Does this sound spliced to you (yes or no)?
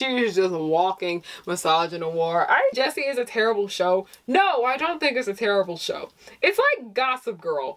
yes